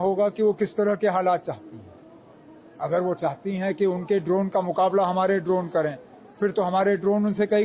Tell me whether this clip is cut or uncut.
uncut